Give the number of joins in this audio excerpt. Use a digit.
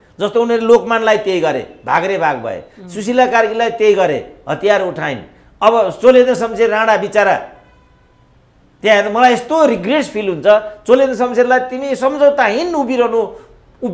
0